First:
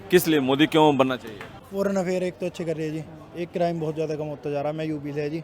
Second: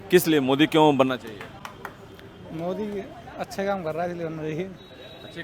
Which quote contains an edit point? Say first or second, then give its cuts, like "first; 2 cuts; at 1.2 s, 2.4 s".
first; 1 cut; at 1.6 s